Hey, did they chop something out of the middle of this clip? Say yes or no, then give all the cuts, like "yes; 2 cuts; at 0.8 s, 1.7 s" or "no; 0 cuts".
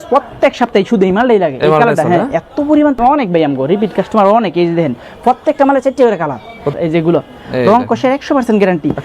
yes; 2 cuts; at 3.0 s, 6.7 s